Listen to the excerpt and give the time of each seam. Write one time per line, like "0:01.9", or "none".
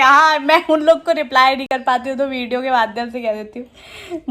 none

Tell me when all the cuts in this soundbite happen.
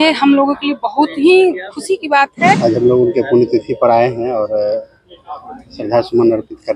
0:02.6

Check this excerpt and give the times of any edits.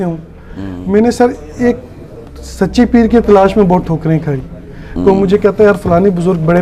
none

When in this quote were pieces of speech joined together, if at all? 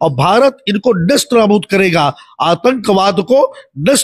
none

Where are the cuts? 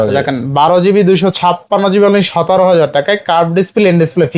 none

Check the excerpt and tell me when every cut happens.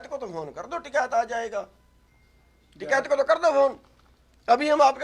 none

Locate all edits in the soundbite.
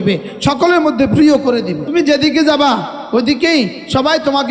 0:01.8

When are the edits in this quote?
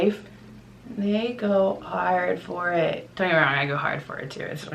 0:03.1

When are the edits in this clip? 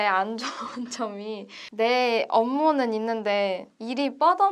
none

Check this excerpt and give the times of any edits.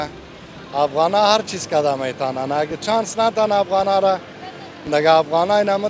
none

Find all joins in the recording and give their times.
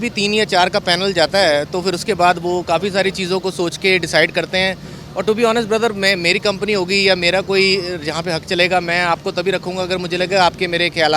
none

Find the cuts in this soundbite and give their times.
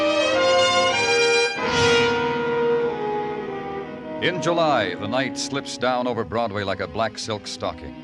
none

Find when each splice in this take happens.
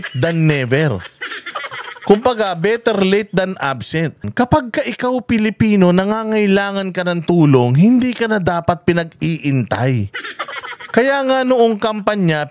0:04.2

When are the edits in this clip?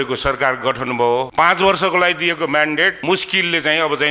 0:01.3
0:03.0

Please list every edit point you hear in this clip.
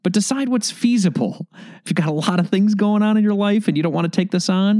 0:01.8

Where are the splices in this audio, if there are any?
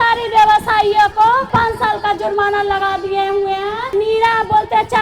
0:01.5
0:03.8

